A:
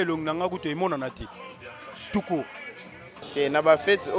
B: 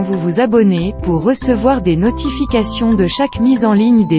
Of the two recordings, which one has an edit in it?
A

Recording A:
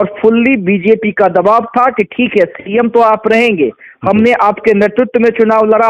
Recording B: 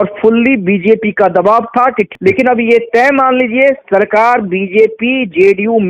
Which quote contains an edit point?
B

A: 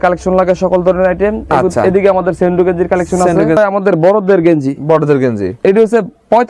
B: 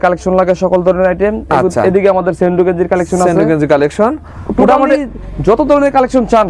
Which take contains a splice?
A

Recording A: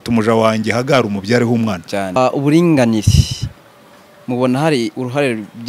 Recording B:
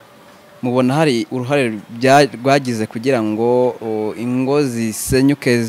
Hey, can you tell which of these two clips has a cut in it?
A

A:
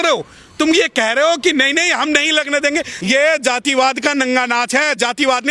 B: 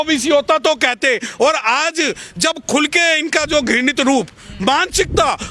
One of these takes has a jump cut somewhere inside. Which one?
A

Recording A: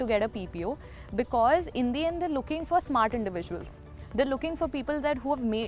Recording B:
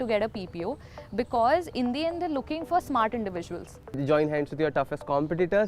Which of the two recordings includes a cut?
B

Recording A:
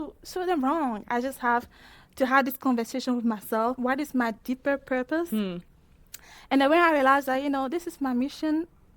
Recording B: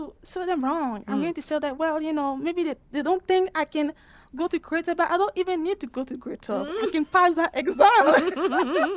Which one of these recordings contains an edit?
A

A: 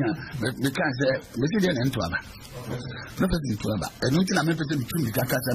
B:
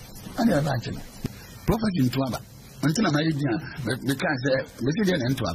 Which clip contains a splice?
B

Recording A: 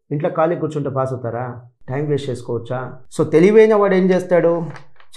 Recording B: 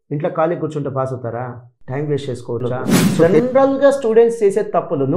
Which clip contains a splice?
B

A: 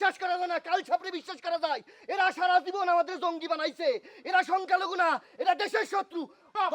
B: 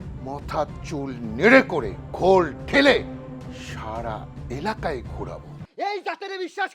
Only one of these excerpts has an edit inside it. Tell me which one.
B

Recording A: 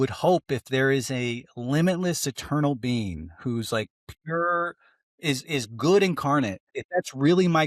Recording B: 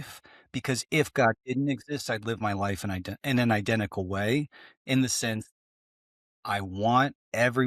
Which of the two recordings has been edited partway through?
A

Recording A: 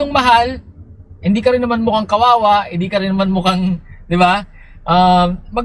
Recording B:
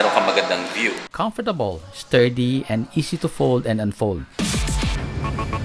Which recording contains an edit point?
B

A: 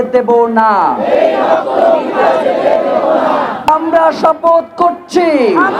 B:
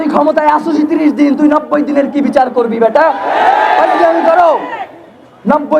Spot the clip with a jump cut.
A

